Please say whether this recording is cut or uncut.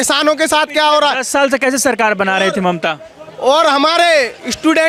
uncut